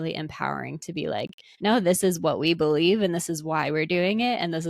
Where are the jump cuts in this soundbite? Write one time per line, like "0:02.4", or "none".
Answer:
0:01.4